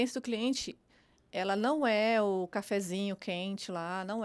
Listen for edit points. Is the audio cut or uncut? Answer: uncut